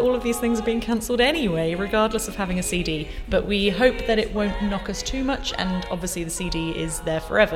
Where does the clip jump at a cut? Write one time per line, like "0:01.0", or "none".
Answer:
none